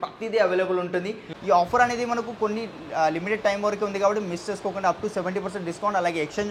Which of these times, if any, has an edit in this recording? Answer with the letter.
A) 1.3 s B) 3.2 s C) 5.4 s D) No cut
A